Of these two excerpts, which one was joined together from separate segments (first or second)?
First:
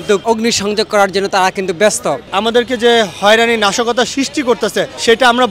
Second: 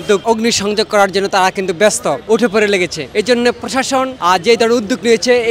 first